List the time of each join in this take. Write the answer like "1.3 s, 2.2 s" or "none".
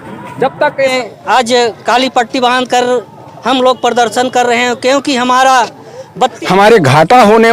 0.9 s, 6.4 s